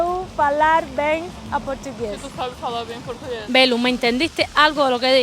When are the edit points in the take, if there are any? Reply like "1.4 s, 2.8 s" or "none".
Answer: 3.4 s